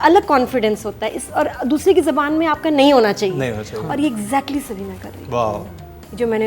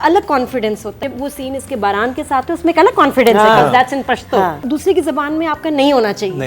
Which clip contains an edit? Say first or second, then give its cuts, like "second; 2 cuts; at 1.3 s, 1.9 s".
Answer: second; 2 cuts; at 1.0 s, 4.6 s